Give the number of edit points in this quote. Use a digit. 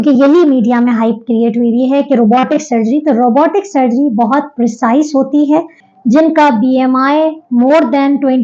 1